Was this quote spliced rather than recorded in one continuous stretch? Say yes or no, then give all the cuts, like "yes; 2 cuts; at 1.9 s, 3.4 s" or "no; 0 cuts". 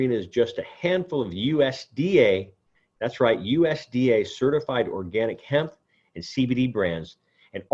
no; 0 cuts